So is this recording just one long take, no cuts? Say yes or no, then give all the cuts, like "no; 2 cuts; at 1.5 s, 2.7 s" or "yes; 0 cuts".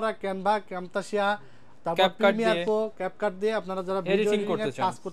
yes; 0 cuts